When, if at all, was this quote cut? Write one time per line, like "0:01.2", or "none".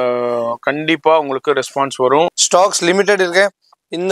0:02.4